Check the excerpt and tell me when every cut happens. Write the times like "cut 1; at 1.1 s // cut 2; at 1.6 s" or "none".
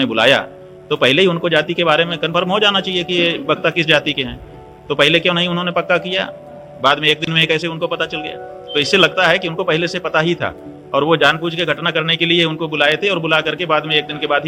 none